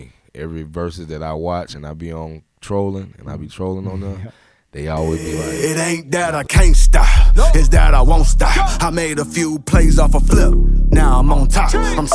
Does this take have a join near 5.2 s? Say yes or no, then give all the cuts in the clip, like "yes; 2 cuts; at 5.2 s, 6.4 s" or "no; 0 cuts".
yes; 1 cut; at 5.2 s